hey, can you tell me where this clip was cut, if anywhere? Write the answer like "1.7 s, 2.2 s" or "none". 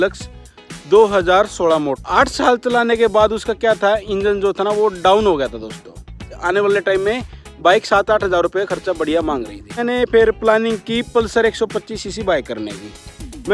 2.0 s, 6.3 s, 9.8 s